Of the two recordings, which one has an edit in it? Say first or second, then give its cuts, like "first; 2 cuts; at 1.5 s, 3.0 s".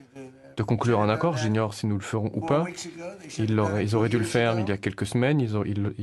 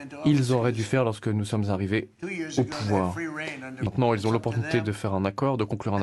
second; 1 cut; at 3.9 s